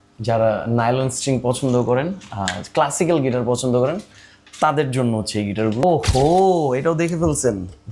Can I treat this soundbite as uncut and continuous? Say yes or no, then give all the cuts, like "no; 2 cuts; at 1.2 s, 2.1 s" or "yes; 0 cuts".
no; 1 cut; at 5.8 s